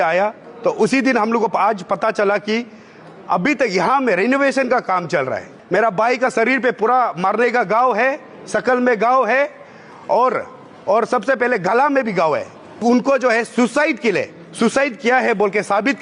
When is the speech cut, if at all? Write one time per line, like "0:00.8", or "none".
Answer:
0:05.5
0:12.8